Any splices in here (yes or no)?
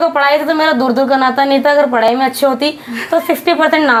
no